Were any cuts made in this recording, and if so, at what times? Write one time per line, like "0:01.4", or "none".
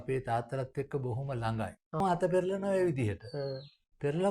0:02.0